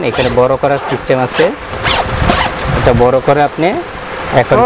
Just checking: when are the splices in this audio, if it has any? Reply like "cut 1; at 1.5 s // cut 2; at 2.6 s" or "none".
none